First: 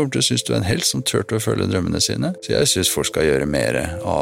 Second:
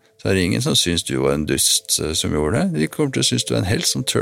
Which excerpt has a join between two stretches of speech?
first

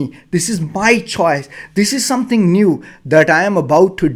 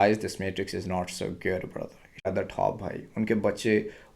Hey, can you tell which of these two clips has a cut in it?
second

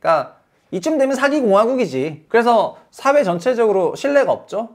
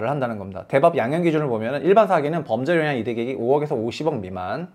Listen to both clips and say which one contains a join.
first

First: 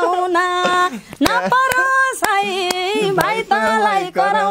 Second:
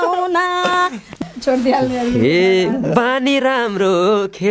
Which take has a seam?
second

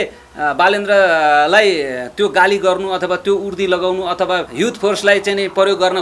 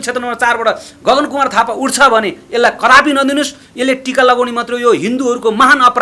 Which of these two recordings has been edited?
first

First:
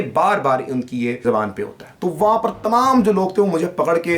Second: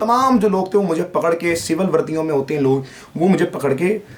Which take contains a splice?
first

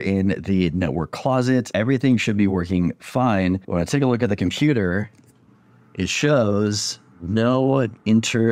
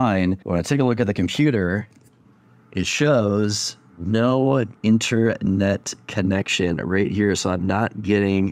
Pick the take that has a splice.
first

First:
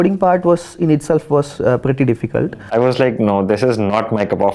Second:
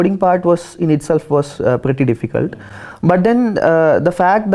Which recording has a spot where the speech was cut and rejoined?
first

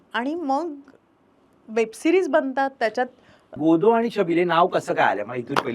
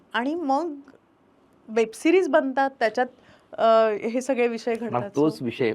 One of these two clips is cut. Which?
first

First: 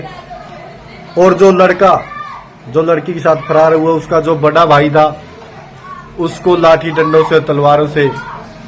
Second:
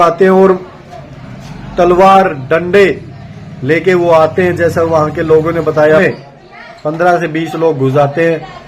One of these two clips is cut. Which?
second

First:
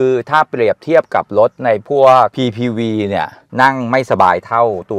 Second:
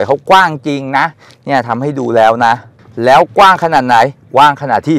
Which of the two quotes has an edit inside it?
first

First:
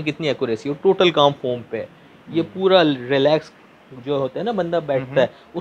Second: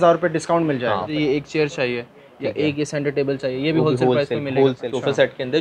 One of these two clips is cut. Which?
second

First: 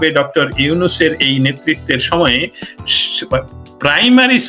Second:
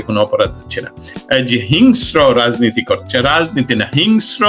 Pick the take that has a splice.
second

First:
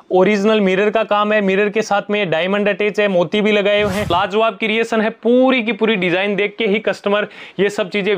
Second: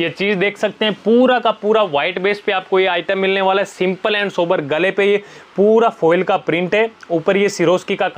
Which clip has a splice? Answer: first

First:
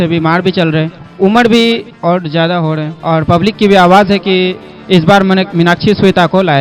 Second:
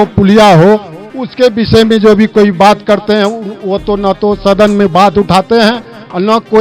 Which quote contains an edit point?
first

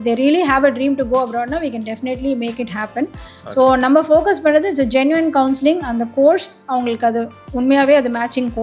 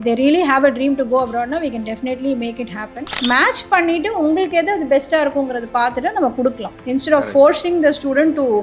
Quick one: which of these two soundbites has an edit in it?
second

